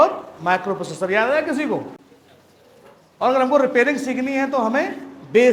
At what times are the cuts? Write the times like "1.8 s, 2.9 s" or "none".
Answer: none